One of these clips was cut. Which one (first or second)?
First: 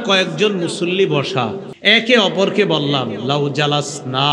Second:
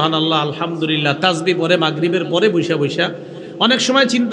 first